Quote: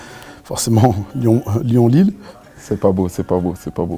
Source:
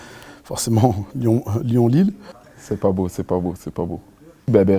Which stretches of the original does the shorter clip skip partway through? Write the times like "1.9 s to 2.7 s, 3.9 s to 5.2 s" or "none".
none